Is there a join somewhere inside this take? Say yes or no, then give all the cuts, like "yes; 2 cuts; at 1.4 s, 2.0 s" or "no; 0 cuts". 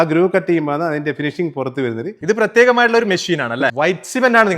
yes; 1 cut; at 3.7 s